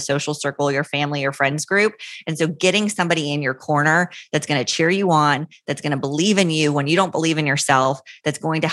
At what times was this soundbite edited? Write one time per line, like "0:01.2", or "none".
none

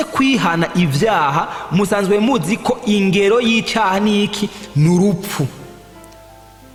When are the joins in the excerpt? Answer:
none

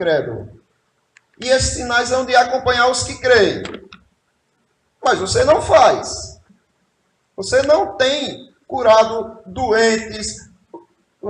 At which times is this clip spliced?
none

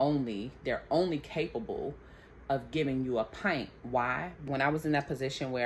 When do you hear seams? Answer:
0:04.4

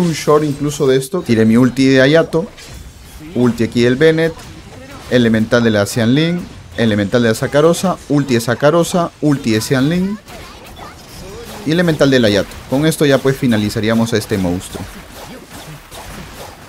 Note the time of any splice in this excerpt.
0:01.2

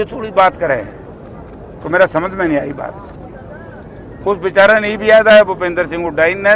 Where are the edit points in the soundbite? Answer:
none

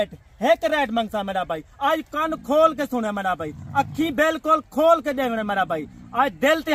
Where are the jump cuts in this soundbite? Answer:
none

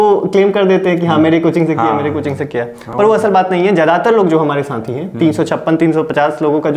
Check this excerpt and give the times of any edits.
none

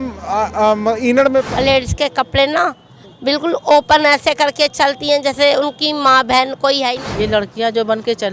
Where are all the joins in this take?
0:01.5
0:07.0

